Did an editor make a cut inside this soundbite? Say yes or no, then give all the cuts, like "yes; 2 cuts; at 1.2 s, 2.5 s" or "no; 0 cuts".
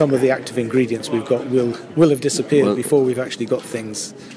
no; 0 cuts